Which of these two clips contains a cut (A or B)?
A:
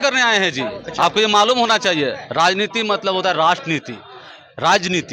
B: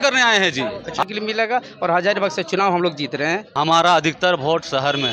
B